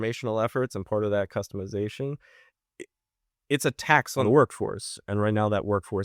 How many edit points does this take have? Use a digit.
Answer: 1